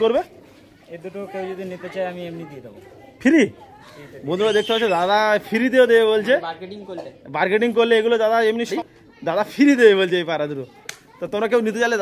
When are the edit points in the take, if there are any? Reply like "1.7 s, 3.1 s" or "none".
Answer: none